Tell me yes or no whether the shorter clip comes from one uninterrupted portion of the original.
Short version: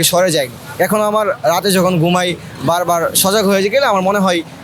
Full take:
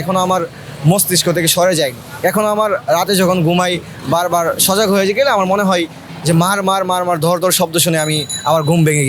yes